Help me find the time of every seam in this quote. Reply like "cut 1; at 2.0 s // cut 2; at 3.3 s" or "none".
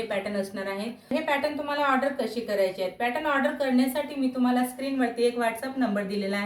cut 1; at 1.1 s